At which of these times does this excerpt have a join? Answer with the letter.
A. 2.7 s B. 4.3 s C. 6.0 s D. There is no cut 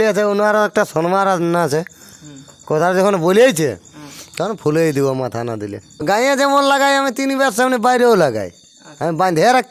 C